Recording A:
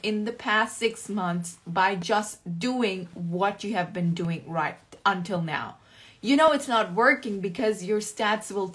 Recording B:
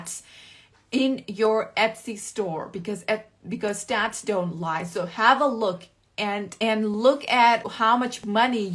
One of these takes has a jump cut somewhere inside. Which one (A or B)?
B